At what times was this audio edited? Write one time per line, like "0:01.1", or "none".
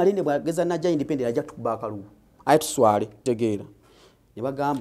0:03.2